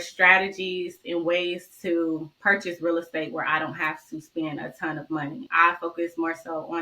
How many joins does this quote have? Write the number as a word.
one